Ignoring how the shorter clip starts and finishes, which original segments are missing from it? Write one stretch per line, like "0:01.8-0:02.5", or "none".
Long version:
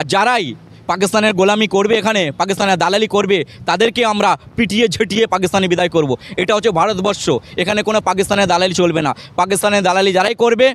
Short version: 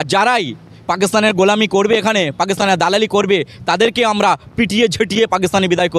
none